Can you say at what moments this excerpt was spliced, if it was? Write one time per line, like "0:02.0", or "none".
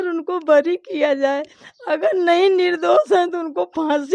none